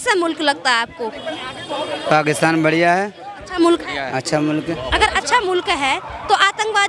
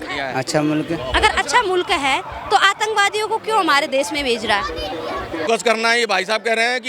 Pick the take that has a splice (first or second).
second